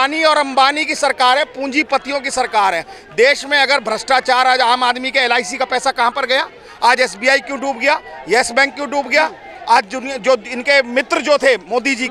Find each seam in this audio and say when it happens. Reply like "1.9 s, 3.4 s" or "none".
none